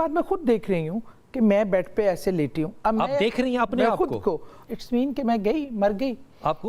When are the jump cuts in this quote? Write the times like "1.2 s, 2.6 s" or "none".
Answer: 4.5 s